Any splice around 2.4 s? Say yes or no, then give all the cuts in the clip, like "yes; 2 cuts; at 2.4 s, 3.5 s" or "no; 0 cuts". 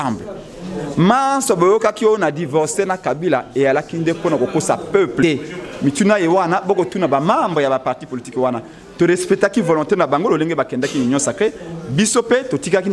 no; 1 cut; at 5.2 s